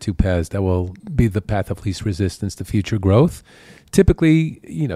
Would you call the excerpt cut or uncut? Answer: uncut